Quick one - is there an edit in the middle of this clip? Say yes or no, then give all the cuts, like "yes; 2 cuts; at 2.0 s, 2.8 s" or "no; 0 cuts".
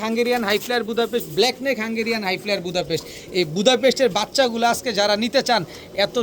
no; 0 cuts